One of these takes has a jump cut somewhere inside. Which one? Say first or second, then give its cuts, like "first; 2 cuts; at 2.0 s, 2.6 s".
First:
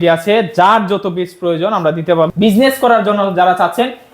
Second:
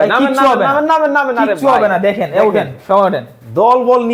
first; 1 cut; at 2.3 s